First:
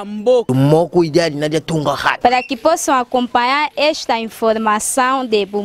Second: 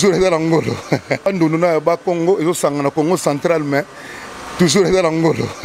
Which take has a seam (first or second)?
second